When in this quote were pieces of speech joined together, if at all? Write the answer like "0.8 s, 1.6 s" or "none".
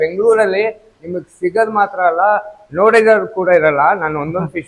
none